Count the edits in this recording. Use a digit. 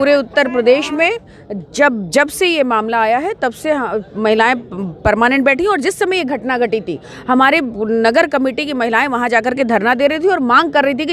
0